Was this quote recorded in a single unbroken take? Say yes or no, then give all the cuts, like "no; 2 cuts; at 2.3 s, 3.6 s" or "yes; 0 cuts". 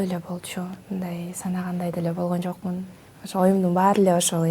yes; 0 cuts